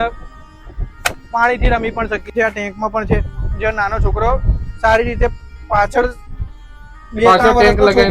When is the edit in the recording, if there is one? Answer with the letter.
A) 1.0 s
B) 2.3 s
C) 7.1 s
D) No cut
B